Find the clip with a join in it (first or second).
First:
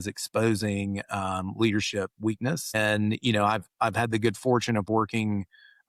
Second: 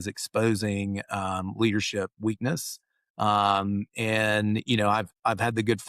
first